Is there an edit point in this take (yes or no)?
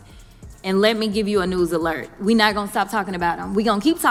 no